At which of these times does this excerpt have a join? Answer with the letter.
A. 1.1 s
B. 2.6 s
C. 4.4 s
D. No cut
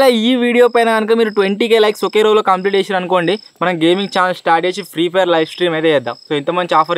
D